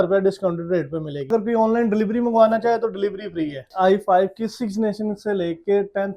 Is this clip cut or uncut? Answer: cut